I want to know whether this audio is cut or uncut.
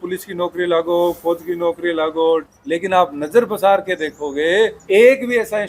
cut